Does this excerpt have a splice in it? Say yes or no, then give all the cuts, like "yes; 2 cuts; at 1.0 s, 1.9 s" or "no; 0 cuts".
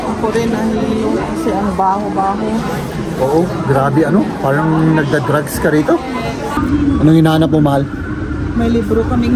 yes; 1 cut; at 6.5 s